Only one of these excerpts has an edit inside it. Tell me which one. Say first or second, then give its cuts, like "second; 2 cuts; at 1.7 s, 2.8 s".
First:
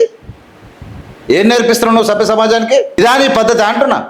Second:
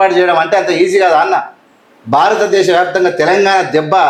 first; 1 cut; at 3.0 s